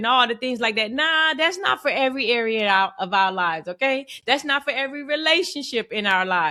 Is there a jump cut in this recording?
no; 0 cuts

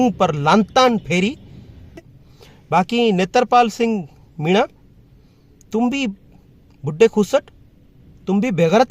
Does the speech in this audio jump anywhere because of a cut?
yes; 1 cut; at 2.2 s

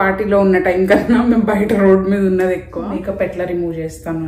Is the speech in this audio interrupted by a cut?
yes; 1 cut; at 3.0 s

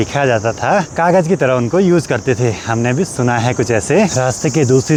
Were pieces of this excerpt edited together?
no; 0 cuts

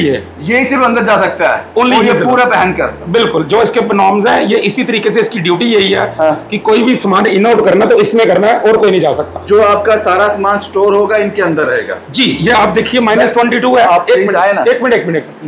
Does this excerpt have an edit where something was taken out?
no; 0 cuts

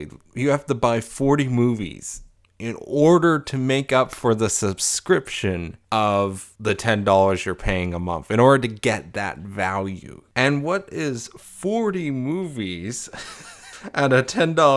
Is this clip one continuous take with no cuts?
yes; 0 cuts

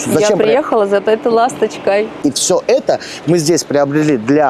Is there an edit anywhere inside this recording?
yes; 1 cut; at 2.2 s

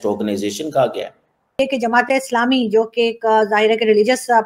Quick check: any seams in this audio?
yes; 1 cut; at 1.5 s

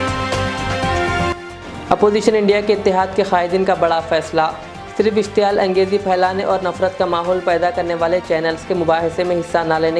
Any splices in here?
no; 0 cuts

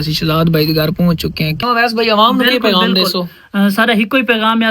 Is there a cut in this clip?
yes; 1 cut; at 1.6 s

